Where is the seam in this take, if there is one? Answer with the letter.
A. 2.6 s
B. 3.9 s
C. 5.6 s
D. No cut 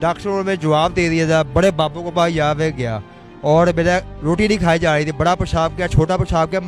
D